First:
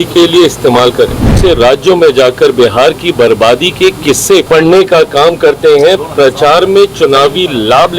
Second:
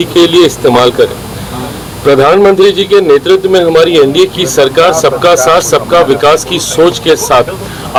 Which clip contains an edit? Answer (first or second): first